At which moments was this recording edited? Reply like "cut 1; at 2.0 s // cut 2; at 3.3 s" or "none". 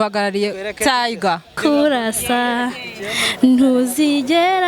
cut 1; at 1.5 s